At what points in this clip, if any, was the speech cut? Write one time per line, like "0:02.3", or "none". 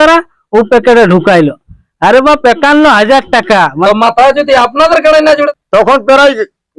0:03.7
0:05.5